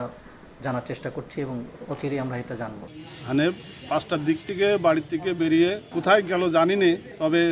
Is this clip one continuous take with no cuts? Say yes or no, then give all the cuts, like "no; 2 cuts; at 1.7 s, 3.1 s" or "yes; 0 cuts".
no; 1 cut; at 2.9 s